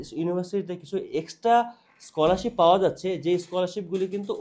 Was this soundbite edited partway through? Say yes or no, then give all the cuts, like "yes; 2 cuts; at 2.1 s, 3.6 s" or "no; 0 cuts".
no; 0 cuts